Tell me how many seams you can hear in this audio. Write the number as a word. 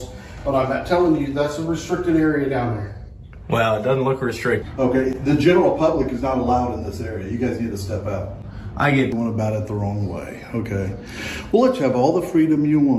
two